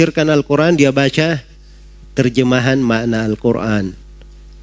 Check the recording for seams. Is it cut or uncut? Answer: uncut